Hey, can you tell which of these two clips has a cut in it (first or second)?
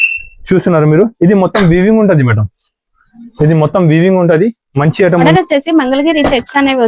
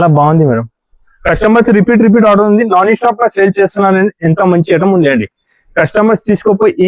first